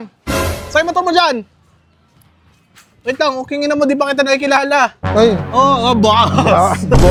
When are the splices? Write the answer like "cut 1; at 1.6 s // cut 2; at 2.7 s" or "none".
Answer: none